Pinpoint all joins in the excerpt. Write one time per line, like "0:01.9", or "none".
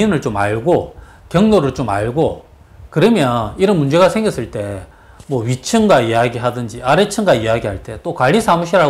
none